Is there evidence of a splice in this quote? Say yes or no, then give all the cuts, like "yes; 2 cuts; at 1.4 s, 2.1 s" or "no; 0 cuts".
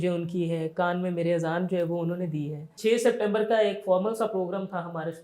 yes; 1 cut; at 2.7 s